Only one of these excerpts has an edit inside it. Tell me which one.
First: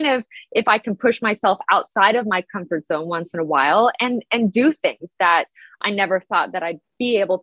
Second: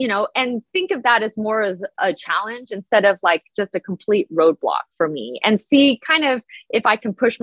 first; 1 cut; at 5.8 s

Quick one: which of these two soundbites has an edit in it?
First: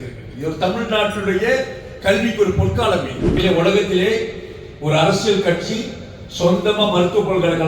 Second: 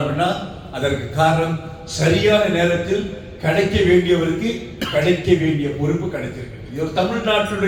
first; 1 cut; at 3.3 s

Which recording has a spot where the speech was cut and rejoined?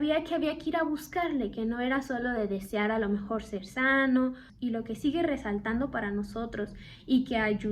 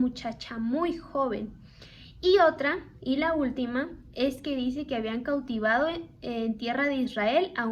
first; 1 cut; at 4.5 s

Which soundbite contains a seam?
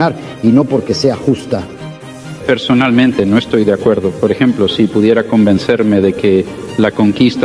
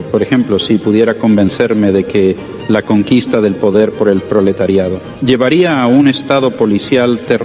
second; 1 cut; at 5.1 s

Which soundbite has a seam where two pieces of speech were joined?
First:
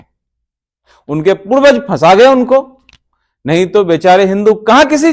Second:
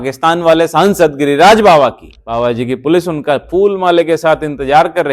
second; 1 cut; at 2.2 s

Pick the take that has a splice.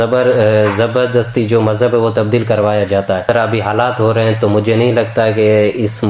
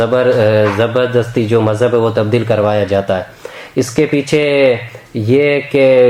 first; 1 cut; at 3.2 s

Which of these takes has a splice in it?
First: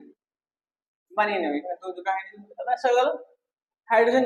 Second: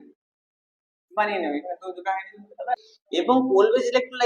second; 1 cut; at 2.7 s

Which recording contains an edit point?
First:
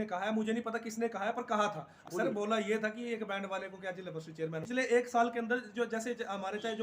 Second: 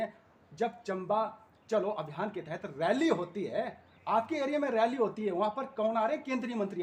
first; 2 cuts; at 2.0 s, 4.6 s

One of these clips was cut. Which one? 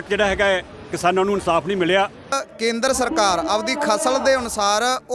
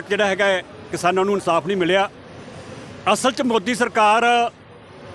first; 1 cut; at 2.4 s

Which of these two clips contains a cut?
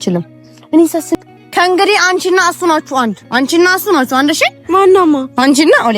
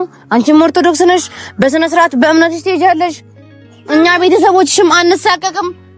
first; 1 cut; at 1.1 s

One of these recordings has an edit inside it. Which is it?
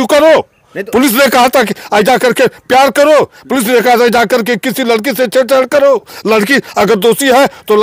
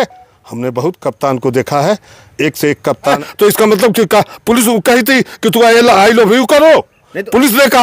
second; 1 cut; at 3.2 s

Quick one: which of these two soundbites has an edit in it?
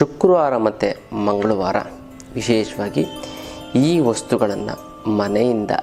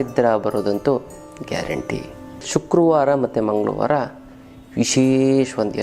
second; 1 cut; at 2.4 s

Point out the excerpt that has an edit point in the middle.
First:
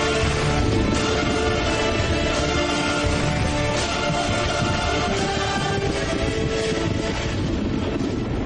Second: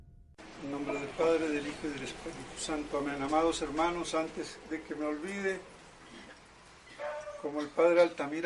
second; 1 cut; at 5.8 s

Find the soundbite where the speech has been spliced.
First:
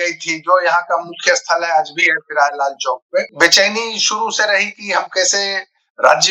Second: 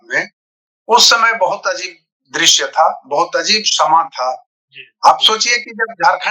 first; 1 cut; at 3.3 s

